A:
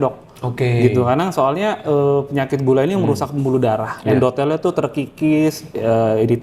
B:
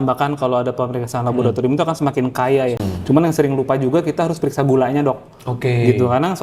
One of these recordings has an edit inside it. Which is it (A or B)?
B